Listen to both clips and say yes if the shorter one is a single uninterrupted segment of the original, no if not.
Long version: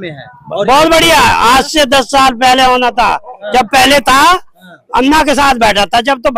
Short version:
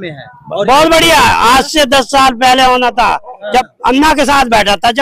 no